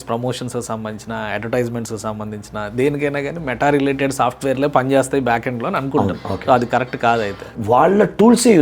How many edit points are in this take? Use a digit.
1